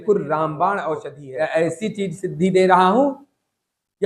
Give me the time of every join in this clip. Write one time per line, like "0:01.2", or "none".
0:01.1